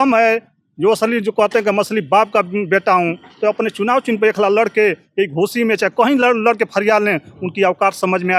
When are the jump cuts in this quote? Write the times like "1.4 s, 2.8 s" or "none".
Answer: none